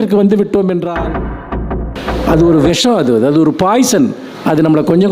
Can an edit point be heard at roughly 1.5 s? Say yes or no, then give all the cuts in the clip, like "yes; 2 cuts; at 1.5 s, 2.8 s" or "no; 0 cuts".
yes; 1 cut; at 1.5 s